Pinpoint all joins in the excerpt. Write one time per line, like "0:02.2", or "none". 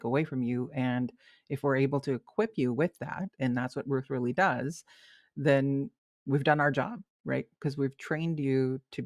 none